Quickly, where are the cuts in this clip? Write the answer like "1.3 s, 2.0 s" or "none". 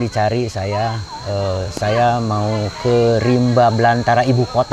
none